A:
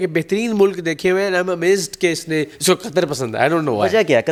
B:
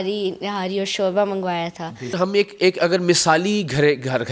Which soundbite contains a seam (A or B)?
B